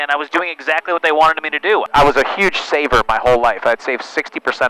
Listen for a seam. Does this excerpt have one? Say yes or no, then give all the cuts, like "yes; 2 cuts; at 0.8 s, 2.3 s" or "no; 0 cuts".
yes; 1 cut; at 1.9 s